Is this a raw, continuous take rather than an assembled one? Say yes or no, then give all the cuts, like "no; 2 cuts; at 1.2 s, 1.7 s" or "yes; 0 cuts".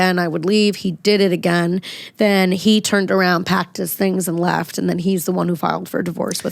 yes; 0 cuts